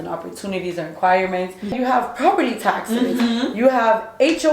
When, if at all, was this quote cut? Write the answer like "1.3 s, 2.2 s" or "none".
1.7 s